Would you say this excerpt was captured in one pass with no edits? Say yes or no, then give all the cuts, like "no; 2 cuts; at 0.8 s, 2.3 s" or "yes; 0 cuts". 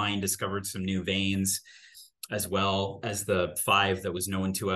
yes; 0 cuts